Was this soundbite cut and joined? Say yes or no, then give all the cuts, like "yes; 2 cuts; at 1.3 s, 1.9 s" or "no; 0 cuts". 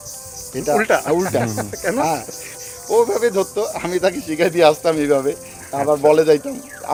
no; 0 cuts